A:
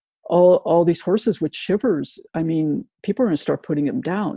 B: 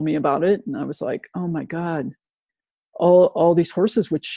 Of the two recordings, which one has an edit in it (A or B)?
A